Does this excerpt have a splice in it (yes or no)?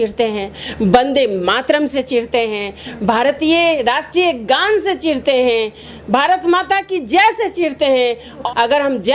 no